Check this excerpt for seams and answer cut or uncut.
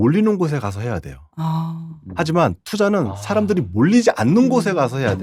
uncut